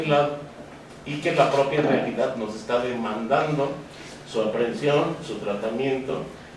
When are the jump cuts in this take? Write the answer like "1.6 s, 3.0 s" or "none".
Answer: 2.5 s